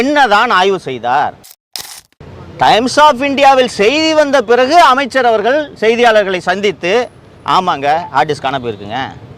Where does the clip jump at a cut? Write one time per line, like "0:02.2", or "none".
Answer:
0:01.8